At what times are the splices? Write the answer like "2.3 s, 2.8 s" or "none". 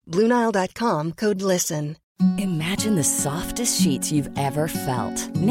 2.0 s